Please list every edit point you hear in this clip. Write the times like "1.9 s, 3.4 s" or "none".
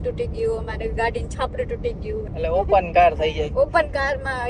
2.3 s